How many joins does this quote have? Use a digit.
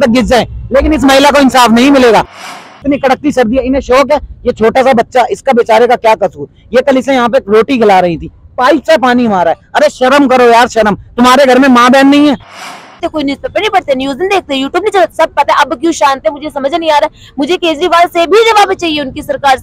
2